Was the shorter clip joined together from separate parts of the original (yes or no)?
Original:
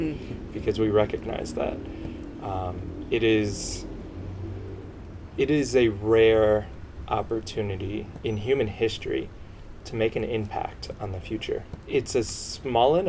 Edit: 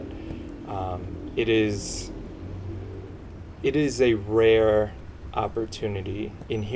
no